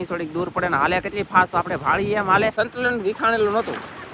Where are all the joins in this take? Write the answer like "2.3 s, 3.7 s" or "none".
2.5 s